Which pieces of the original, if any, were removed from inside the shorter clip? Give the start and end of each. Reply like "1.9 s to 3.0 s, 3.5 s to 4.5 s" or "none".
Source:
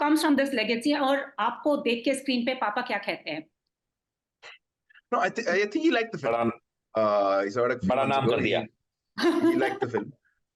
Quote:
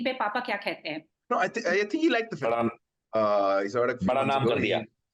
3.5 s to 4.9 s